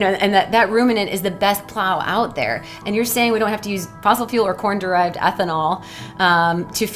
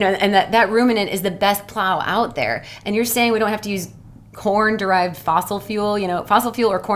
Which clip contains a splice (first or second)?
first